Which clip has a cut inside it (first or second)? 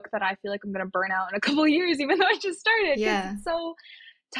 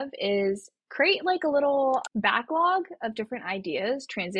second